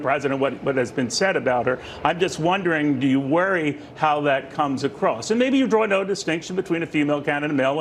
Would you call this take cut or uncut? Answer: uncut